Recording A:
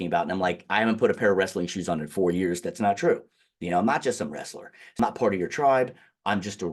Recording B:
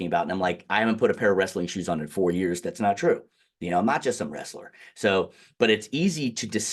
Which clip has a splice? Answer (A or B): A